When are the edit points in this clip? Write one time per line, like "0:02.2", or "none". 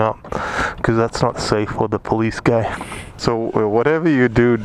0:03.2